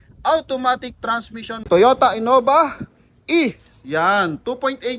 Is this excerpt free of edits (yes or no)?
no